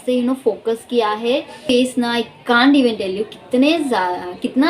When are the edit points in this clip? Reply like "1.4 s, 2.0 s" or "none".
1.6 s